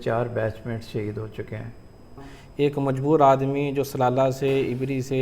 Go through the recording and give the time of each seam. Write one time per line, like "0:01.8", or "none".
0:02.2